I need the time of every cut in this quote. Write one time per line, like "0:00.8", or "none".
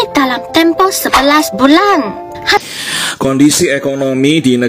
0:02.6